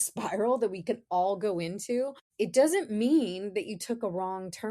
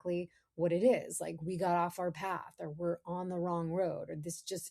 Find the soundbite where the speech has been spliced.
first; 1 cut; at 2.2 s

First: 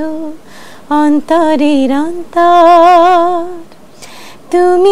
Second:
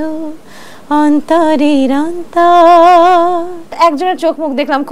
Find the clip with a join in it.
second; 1 cut; at 3.7 s

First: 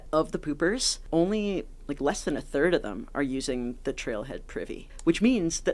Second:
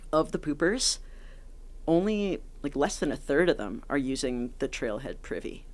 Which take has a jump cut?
first; 2 cuts; at 0.9 s, 4.8 s

